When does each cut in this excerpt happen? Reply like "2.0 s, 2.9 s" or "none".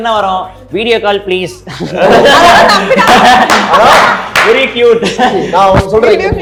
none